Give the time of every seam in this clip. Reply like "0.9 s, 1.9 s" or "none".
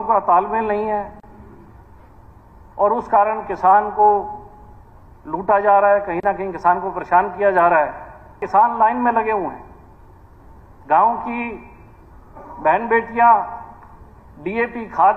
8.4 s